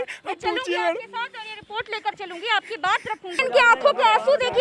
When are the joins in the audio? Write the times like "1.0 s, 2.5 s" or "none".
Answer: 3.5 s